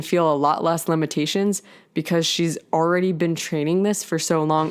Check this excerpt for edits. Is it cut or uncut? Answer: uncut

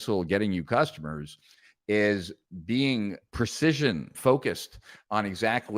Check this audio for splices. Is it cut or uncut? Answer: cut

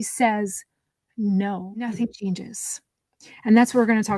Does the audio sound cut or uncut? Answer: cut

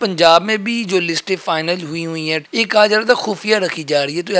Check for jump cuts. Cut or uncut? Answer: cut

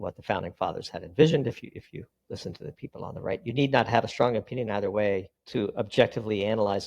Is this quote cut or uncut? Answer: cut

